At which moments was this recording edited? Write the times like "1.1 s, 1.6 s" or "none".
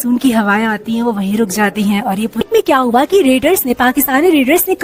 2.4 s